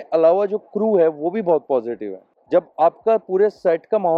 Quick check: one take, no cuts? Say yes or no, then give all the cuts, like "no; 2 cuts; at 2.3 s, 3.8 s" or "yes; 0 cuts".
yes; 0 cuts